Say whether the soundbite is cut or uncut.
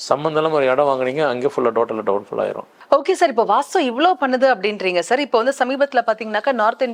cut